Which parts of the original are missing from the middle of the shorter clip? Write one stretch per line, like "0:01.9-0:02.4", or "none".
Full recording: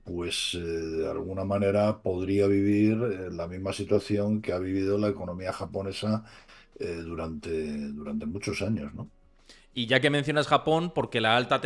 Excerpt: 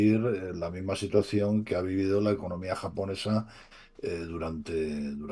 none